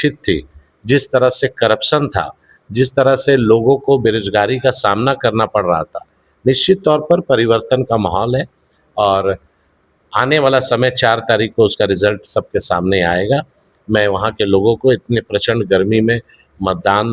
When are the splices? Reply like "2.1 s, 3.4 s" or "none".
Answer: none